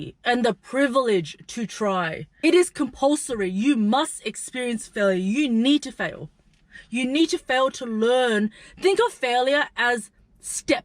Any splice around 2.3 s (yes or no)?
yes